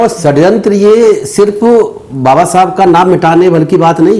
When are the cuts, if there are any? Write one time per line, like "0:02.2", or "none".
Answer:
none